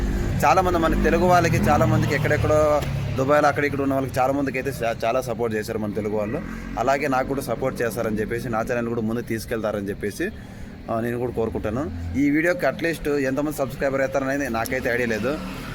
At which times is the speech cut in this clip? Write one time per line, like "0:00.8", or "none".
none